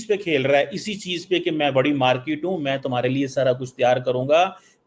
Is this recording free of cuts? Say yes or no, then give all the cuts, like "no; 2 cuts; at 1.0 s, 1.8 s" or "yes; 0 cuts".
yes; 0 cuts